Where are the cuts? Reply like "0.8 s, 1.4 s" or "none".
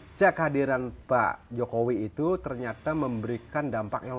0.9 s